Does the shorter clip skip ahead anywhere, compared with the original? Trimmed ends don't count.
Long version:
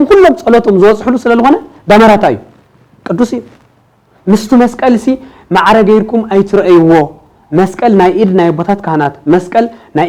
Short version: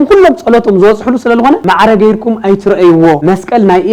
yes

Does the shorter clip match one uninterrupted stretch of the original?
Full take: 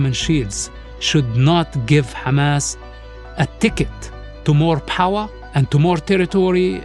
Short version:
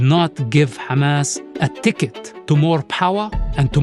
no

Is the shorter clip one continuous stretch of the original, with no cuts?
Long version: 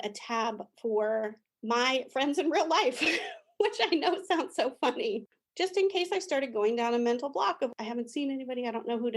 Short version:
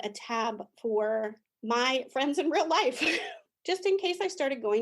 no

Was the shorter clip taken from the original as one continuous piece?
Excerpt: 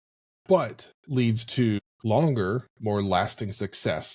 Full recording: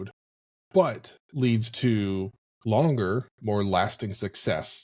no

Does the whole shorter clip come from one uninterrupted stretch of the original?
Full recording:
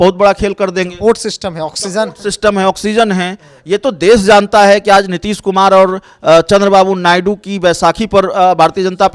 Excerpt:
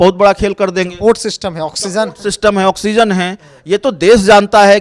yes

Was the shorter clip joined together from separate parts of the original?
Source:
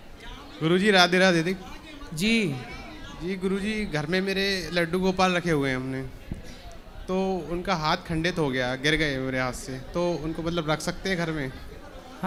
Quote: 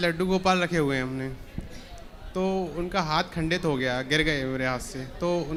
no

